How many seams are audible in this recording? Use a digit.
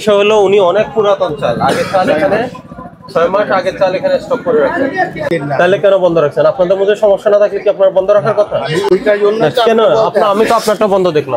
1